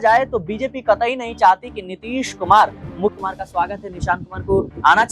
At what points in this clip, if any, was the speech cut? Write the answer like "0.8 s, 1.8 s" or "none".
3.1 s